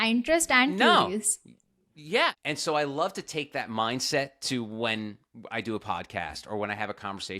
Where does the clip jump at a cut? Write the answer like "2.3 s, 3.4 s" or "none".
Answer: 2.4 s